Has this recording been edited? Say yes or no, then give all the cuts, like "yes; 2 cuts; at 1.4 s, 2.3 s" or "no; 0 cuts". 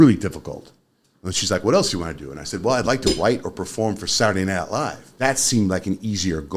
yes; 1 cut; at 5.0 s